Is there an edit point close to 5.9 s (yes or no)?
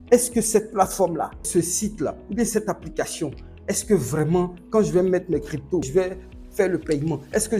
yes